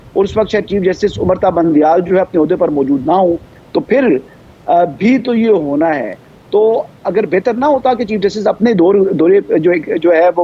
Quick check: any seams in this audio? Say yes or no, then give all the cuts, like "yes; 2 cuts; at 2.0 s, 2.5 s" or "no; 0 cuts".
no; 0 cuts